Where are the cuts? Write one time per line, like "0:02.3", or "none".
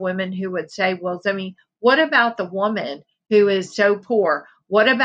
none